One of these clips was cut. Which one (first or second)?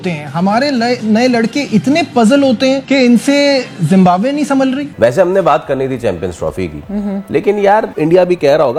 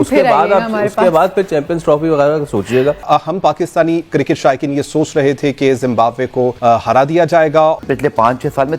second